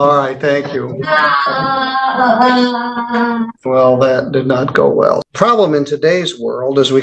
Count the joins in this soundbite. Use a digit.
2